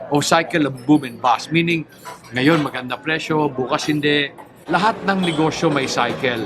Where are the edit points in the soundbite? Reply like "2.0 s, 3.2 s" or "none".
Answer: 4.5 s